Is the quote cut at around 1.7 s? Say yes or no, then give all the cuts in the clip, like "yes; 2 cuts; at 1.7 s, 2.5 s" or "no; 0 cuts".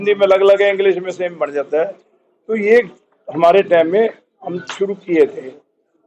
no; 0 cuts